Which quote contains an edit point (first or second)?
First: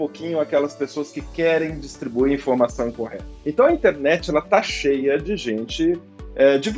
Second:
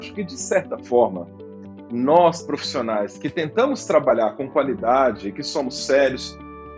first